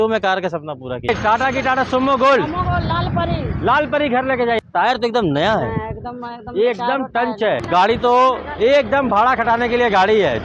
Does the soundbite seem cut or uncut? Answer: cut